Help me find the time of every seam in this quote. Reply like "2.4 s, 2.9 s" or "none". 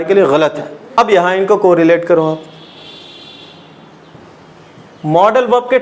1.0 s